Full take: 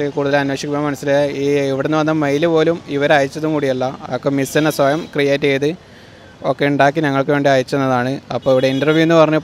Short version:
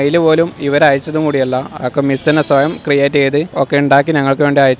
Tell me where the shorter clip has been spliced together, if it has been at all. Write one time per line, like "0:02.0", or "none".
0:03.5